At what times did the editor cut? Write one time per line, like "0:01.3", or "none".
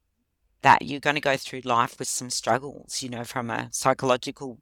none